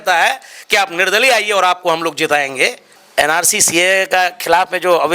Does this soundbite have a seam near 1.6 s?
no; 1 cut; at 3.0 s

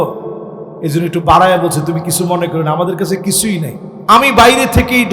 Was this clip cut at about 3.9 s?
yes; 1 cut; at 3.9 s

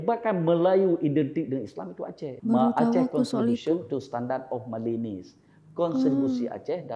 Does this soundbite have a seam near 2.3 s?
yes; 1 cut; at 2.3 s

